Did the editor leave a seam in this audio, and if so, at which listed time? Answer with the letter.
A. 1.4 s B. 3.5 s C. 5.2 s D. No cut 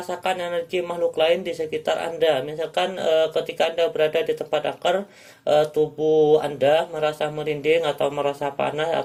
D